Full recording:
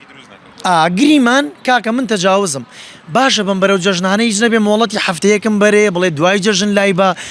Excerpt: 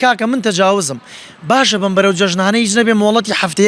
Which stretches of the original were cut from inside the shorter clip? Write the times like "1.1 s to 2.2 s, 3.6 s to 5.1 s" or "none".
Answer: none